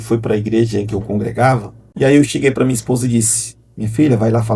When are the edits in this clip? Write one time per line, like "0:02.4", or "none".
0:01.8